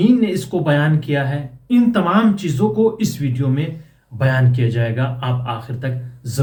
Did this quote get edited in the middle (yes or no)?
no